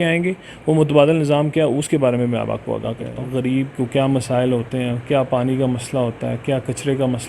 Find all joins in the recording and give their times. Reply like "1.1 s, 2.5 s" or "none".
3.1 s